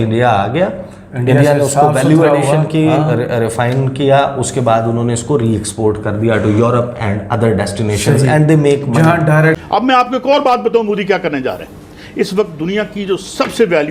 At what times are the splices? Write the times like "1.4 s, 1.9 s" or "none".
9.6 s